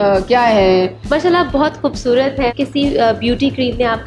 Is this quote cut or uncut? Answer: cut